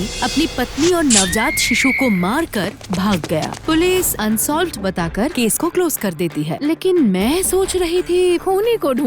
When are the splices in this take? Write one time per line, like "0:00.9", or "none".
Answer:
0:03.5